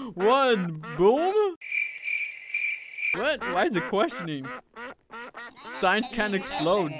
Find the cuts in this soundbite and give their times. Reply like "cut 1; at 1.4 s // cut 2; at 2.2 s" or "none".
cut 1; at 1.7 s